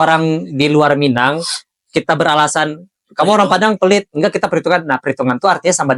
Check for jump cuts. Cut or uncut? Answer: uncut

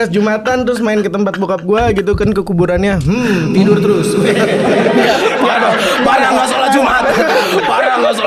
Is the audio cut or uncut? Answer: uncut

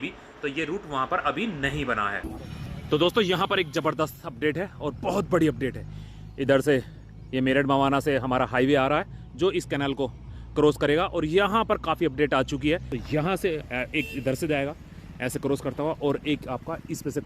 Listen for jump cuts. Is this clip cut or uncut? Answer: cut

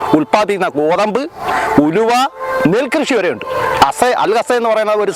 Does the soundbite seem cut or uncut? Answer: uncut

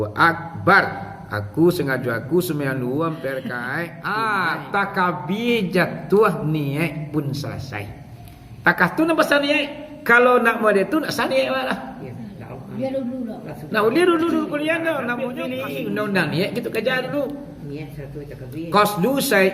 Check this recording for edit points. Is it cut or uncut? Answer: cut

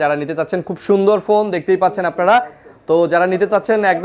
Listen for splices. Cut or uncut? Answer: uncut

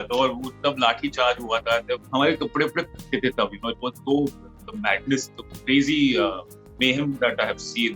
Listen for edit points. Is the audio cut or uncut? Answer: cut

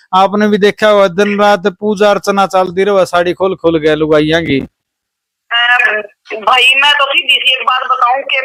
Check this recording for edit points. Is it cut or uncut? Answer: uncut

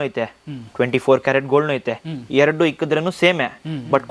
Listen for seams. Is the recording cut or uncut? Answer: uncut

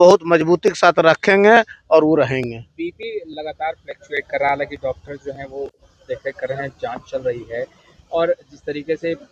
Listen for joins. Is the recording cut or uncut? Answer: uncut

